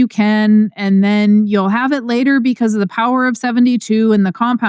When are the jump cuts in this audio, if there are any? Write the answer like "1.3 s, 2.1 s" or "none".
none